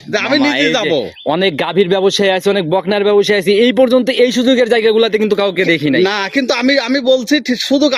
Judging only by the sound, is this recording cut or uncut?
uncut